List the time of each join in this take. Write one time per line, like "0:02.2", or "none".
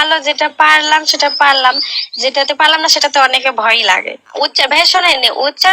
0:04.3